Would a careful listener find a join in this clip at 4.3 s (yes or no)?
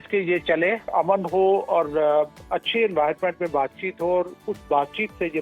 no